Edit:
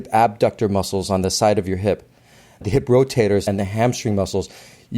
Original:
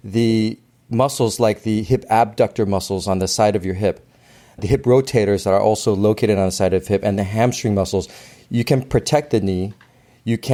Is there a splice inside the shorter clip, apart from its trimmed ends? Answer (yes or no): yes